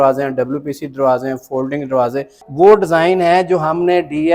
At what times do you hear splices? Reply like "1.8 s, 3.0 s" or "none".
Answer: 2.4 s

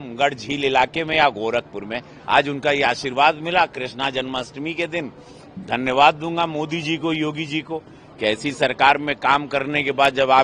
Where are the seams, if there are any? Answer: none

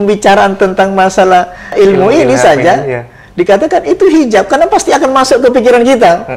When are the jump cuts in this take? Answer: 1.7 s

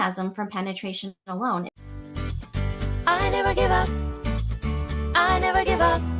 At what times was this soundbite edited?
2.3 s

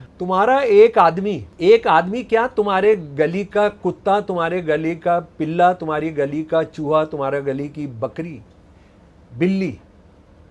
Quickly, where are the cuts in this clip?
1.5 s

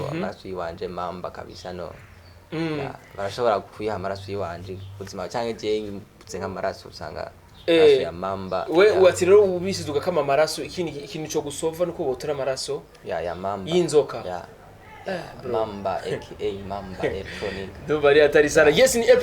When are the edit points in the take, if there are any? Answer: none

